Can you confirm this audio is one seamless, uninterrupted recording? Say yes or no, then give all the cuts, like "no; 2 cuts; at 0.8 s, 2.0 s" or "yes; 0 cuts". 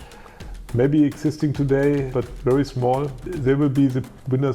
no; 2 cuts; at 2.1 s, 3.2 s